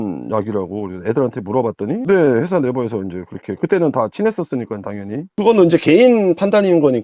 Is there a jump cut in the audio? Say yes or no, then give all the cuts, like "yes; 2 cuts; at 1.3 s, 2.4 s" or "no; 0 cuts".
yes; 2 cuts; at 2.0 s, 5.3 s